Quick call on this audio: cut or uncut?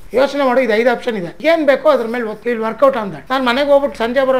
cut